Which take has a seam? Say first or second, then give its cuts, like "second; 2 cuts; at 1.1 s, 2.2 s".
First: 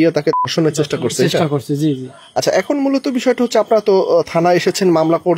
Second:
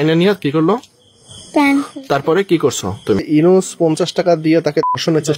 second; 1 cut; at 3.2 s